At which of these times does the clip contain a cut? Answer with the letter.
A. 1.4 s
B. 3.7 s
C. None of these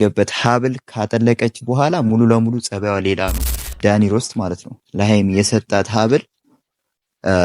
B